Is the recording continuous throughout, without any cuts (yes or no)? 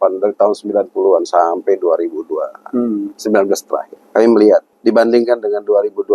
no